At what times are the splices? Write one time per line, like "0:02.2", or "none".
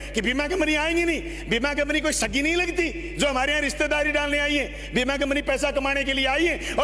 none